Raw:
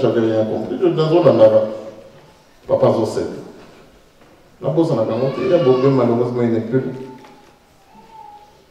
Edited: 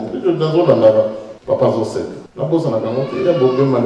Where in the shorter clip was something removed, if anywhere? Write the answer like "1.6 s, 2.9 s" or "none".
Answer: 1.3 s, 2.2 s